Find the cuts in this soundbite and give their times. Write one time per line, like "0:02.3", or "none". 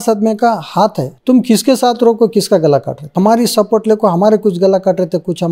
0:01.1
0:03.1